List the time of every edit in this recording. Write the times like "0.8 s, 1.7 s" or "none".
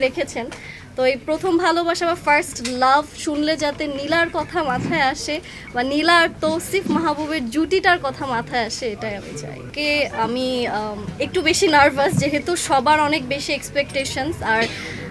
9.6 s